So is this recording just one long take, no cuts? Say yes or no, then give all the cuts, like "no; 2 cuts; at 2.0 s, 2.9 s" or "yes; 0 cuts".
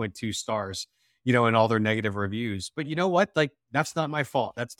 yes; 0 cuts